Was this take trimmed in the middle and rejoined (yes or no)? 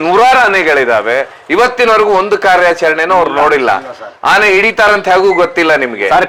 no